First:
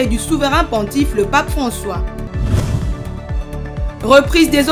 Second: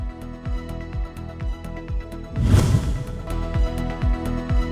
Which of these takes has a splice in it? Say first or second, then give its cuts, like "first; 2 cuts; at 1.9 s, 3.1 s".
second; 1 cut; at 1.1 s